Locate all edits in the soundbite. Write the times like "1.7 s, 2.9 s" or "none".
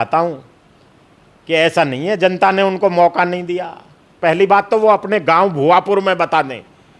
4.2 s